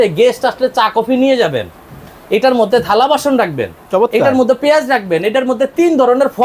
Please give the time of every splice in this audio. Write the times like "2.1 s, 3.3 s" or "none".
none

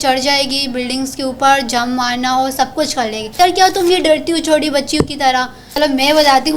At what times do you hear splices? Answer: 3.4 s, 5.8 s

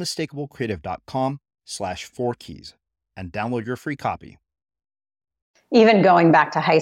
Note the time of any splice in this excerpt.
5.5 s

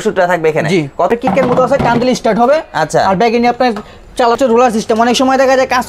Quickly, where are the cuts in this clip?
1.1 s, 4.4 s

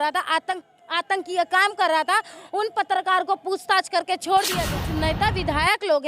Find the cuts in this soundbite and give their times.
4.7 s

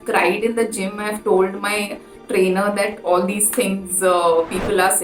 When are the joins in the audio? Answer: none

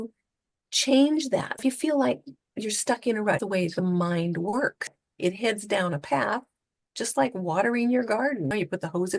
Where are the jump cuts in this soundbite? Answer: 1.6 s, 3.4 s, 5.0 s, 8.5 s

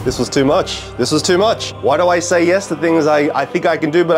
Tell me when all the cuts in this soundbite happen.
none

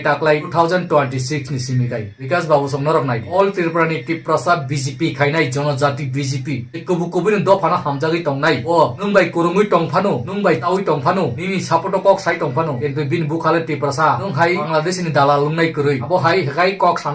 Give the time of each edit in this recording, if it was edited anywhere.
9.0 s, 10.6 s, 14.7 s

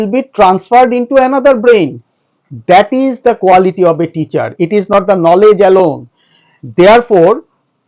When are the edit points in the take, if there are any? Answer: none

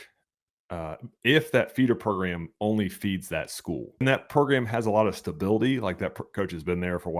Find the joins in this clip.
4.0 s

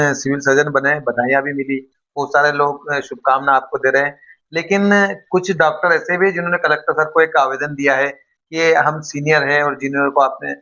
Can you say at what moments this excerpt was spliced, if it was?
none

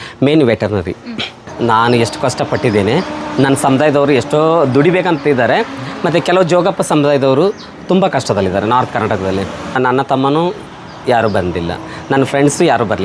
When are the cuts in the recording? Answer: 1.4 s, 9.8 s

